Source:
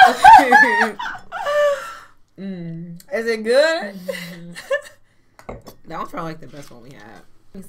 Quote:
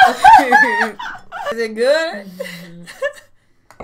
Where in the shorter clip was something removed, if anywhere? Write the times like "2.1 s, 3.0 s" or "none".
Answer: 1.5 s